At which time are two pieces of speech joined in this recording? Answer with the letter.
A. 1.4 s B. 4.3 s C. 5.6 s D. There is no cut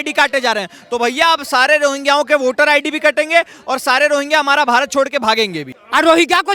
C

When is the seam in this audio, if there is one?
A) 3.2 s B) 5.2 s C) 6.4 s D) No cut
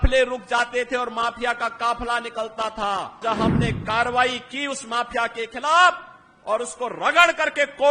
A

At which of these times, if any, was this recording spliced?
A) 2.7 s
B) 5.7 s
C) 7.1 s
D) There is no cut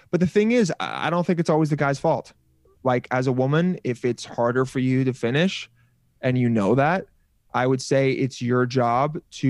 A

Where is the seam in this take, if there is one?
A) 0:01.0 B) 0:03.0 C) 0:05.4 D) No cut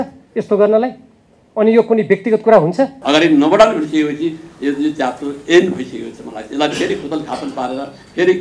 B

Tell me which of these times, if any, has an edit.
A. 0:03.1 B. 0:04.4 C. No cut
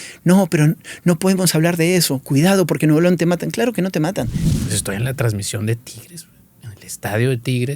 B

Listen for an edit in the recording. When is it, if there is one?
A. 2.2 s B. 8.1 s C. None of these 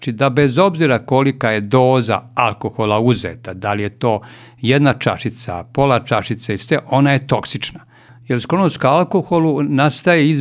B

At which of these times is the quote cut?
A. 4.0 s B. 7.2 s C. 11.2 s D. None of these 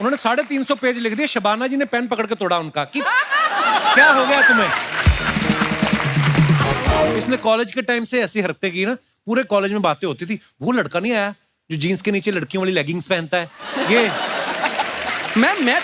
B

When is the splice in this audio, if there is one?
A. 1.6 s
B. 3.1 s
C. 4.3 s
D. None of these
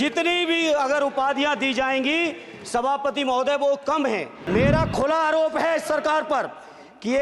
C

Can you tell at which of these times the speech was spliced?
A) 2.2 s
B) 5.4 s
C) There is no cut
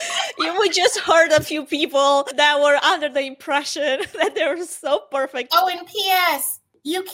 B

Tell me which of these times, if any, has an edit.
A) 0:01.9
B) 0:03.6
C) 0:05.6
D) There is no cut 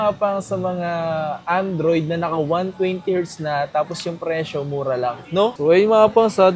C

